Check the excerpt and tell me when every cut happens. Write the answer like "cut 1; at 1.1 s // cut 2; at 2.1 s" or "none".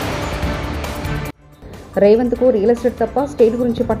cut 1; at 1.3 s